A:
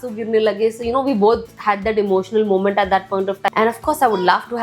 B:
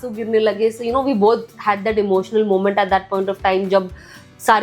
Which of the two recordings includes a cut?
A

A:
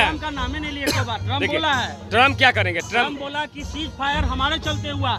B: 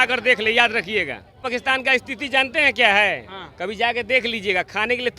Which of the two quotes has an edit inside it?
B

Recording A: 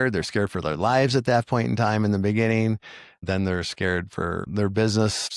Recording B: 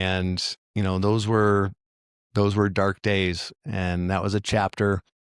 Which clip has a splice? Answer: A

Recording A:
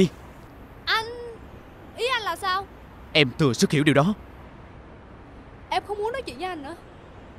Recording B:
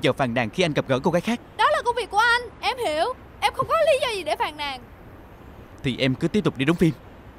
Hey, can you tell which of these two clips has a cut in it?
B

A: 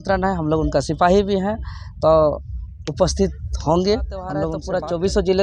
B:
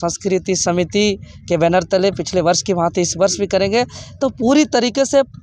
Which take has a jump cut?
A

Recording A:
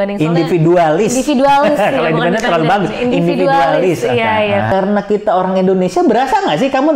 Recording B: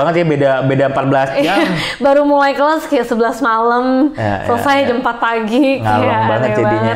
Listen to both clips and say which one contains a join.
A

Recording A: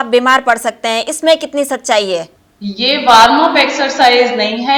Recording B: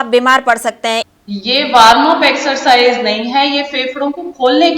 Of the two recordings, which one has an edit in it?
B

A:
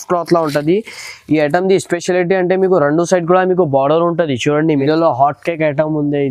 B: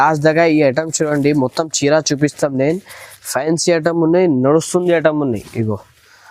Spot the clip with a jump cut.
A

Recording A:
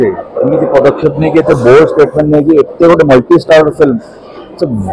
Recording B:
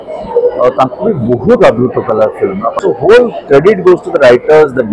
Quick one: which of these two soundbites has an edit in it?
B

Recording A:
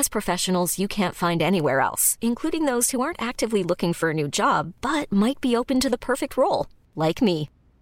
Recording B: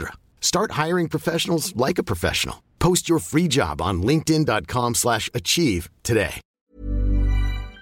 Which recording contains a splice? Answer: B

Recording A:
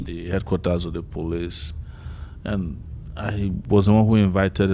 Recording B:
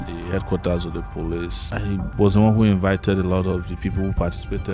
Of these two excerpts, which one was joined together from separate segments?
B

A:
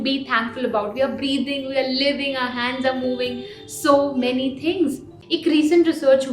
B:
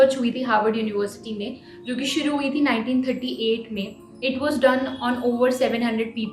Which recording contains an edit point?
A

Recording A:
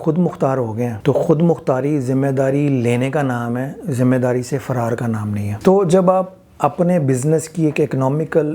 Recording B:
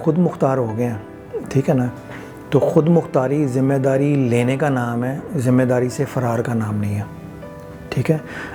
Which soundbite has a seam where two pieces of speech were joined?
A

